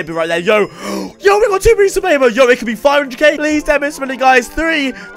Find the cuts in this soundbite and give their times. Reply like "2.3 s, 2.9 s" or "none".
3.4 s